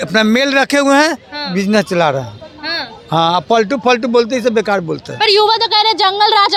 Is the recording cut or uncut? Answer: uncut